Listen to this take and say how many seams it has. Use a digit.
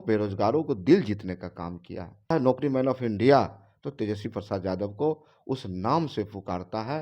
1